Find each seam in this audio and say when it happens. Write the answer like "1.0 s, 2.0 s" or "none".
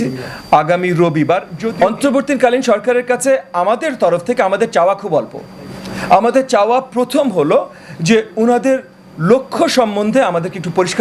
1.6 s

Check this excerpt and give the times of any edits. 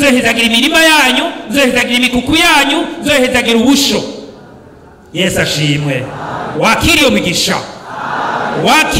none

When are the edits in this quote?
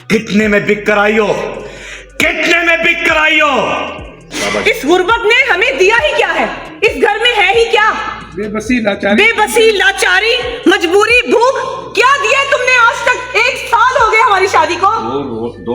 4.3 s

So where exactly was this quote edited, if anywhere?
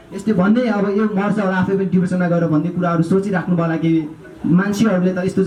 none

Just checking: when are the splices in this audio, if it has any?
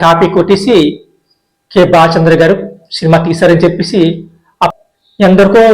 4.7 s

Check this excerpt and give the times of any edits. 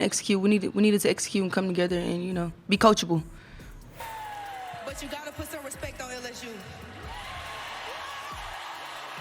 3.8 s

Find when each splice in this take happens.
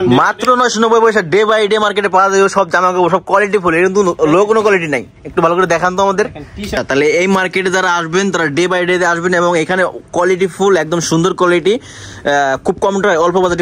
6.7 s

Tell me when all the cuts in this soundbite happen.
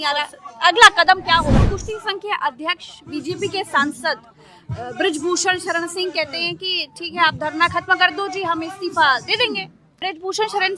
1.6 s, 9.8 s

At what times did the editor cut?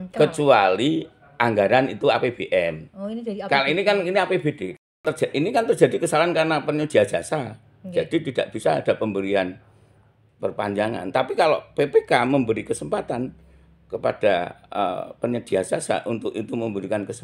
4.8 s

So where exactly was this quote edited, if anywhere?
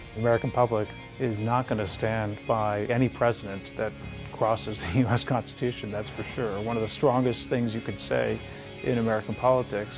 1.0 s

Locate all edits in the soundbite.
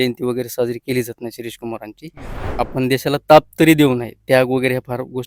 2.4 s

